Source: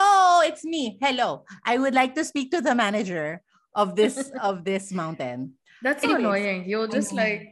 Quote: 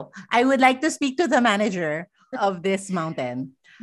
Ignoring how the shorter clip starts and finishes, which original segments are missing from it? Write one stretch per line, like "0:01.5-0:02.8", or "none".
0:03.6-0:04.3